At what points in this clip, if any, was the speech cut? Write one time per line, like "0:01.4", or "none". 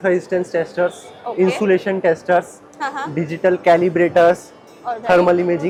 none